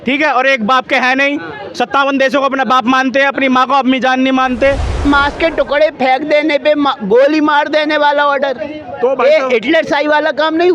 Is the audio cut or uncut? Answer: cut